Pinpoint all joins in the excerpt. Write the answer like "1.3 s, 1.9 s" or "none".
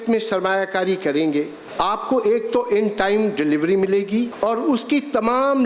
1.6 s, 4.3 s